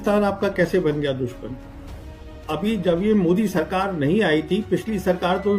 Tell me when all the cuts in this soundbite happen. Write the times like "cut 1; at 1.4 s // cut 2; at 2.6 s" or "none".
none